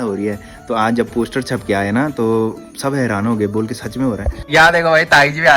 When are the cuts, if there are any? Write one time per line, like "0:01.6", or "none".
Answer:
0:04.3